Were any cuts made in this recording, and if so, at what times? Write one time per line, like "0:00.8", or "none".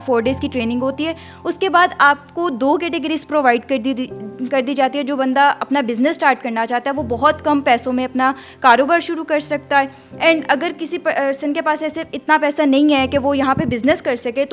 none